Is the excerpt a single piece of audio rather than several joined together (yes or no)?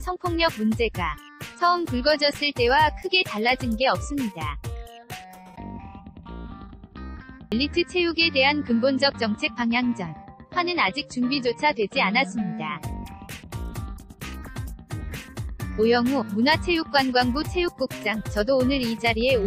no